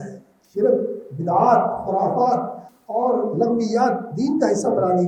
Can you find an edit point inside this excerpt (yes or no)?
no